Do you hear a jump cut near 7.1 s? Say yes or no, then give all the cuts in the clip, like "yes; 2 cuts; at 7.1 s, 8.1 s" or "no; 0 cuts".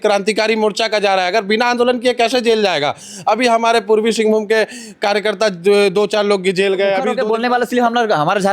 yes; 1 cut; at 7.1 s